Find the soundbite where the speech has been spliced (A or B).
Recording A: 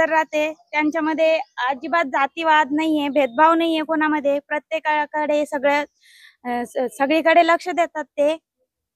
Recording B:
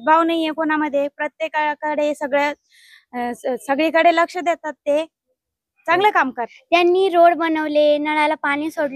B